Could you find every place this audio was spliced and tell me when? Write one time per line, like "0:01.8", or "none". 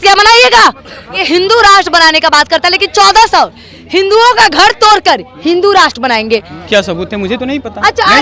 0:01.2
0:06.6